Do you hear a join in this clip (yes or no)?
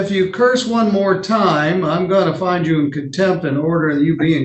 no